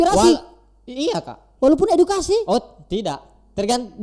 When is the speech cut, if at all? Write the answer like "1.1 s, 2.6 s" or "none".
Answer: none